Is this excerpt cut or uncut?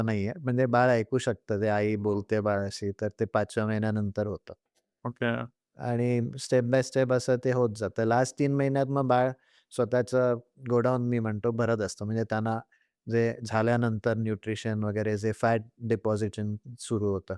uncut